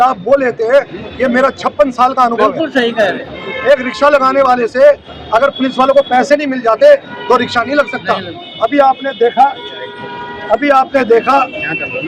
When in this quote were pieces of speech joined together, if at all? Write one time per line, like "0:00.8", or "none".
none